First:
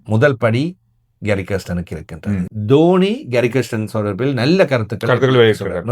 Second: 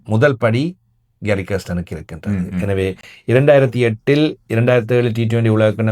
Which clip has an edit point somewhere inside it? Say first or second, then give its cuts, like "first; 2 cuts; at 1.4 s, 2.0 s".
first; 1 cut; at 2.5 s